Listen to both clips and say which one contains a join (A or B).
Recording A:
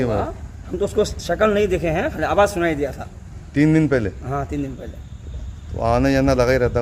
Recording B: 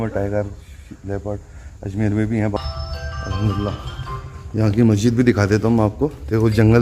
B